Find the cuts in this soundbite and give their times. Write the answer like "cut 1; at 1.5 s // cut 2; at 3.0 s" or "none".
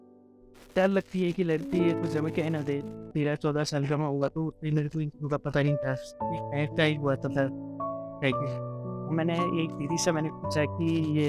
cut 1; at 3.0 s